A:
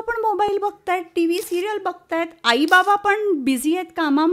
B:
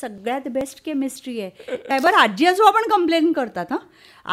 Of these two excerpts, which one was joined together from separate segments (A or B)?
B